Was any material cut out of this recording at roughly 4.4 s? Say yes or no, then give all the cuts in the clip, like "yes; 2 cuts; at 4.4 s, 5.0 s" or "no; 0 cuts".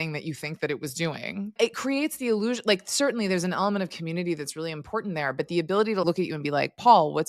no; 2 cuts; at 1.5 s, 6.0 s